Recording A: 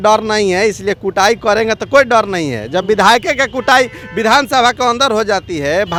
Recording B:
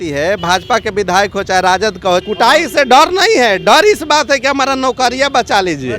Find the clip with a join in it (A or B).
B